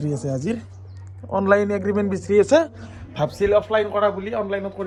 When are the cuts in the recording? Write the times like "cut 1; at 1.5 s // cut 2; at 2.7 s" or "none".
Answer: none